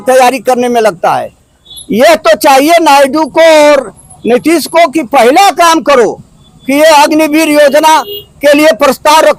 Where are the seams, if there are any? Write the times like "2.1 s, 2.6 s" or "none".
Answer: none